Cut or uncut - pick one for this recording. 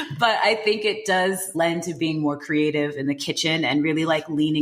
cut